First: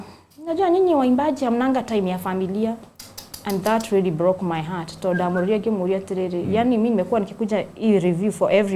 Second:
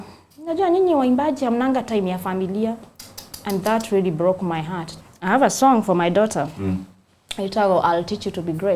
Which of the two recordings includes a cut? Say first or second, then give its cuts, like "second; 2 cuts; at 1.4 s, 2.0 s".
second; 1 cut; at 4.8 s